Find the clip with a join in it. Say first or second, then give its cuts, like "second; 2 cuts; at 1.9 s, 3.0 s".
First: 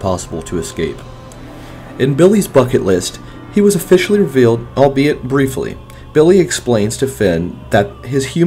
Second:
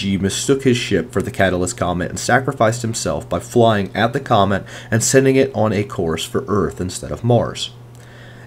second; 1 cut; at 2.5 s